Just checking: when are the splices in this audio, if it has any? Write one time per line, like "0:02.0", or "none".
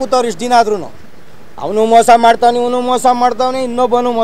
none